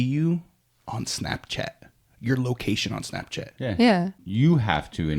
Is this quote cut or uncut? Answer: cut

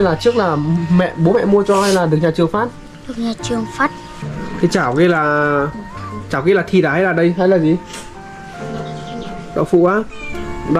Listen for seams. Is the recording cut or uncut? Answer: cut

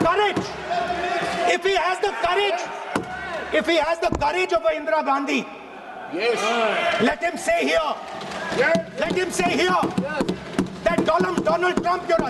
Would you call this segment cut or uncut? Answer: uncut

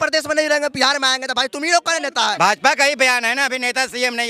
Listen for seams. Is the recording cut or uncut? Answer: cut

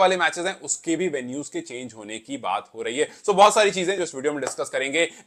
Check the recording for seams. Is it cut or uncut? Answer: uncut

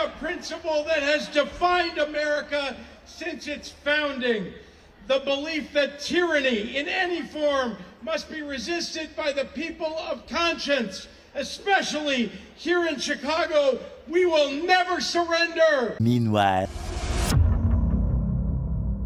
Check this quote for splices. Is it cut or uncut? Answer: uncut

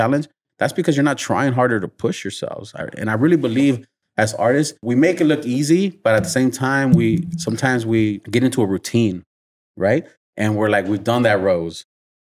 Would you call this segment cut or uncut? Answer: cut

